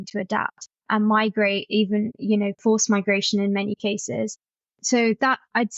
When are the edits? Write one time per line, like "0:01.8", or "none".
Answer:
none